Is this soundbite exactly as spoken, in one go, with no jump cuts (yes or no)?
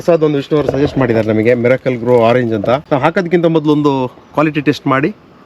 no